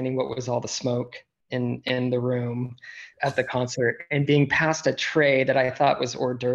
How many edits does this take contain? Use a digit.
1